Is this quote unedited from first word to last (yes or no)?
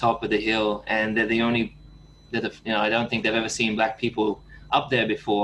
yes